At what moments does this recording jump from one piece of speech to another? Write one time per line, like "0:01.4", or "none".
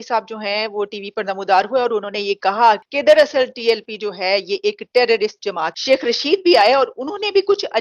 0:02.8
0:05.7